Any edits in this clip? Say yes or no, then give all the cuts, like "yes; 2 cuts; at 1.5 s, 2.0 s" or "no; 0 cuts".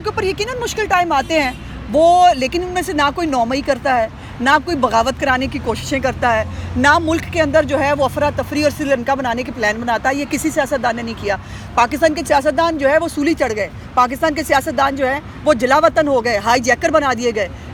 no; 0 cuts